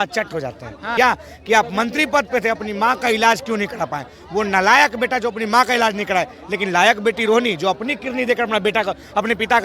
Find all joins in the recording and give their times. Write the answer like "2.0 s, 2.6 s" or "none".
0.9 s

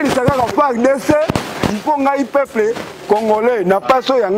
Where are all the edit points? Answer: none

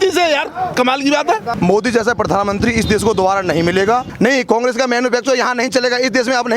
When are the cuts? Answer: 1.5 s, 4.1 s

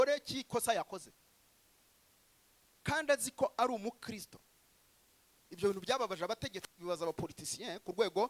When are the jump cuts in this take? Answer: none

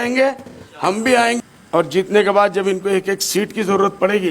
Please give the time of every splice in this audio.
1.4 s

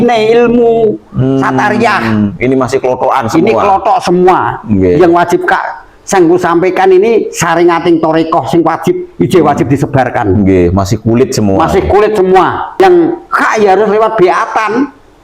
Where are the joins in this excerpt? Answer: 12.8 s

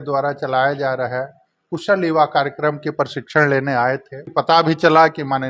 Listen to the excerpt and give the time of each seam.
4.2 s

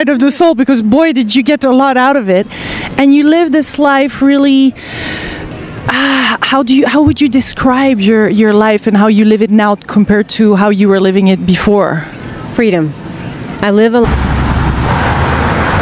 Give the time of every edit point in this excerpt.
none

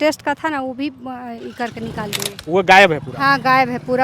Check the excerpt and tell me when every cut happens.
2.3 s

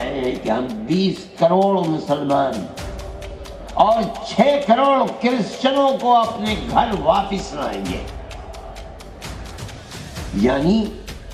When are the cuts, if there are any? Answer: none

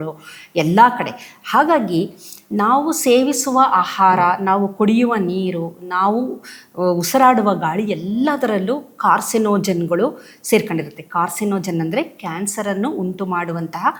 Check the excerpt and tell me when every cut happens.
none

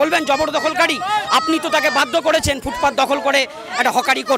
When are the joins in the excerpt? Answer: none

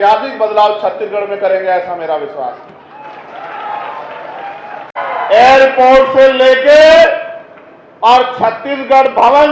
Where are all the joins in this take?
4.9 s

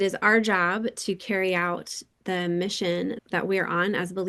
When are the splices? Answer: 3.2 s

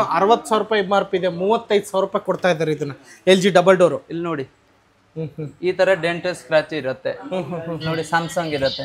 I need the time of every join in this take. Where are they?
none

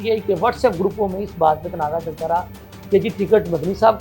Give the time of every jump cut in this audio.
none

